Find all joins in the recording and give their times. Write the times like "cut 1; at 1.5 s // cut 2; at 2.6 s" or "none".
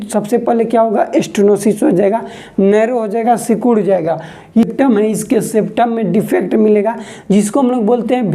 cut 1; at 4.6 s